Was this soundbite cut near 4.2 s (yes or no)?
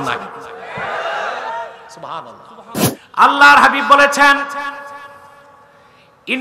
no